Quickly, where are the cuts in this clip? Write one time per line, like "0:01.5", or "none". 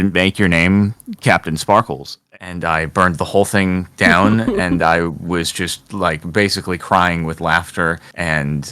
0:02.2